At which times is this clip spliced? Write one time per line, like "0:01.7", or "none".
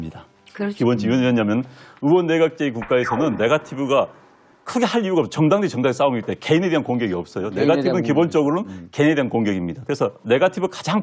0:05.9

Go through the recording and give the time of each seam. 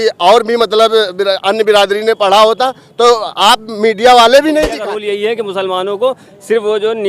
0:04.9

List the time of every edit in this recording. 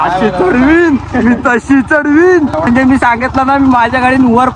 0:02.7

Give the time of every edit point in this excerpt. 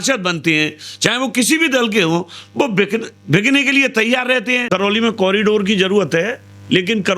0:04.6

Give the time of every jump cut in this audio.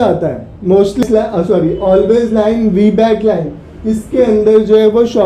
0:01.0

